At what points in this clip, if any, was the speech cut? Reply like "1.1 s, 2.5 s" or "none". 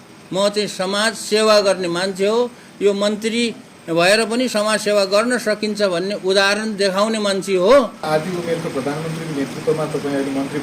8.0 s